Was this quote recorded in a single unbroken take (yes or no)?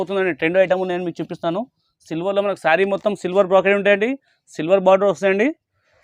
yes